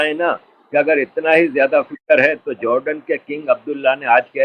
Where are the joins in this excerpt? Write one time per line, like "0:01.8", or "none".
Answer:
none